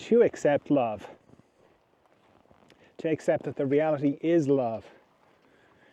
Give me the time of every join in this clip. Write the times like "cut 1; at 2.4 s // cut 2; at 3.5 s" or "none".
none